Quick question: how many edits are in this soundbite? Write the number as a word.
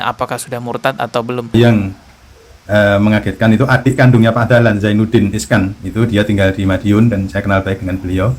one